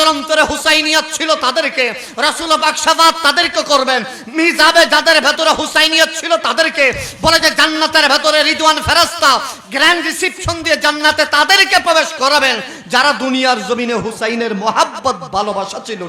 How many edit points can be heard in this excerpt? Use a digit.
0